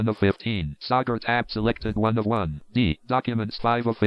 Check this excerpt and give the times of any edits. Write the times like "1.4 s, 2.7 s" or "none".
3.0 s